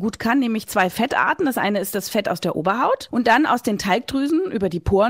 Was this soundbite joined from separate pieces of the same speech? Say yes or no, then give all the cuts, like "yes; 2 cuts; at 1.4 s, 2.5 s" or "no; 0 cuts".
yes; 1 cut; at 3.1 s